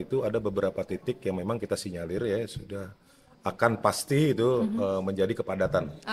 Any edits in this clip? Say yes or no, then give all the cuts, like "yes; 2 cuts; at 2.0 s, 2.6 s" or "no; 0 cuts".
no; 0 cuts